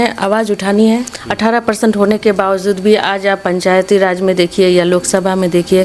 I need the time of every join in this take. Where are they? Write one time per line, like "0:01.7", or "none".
0:01.1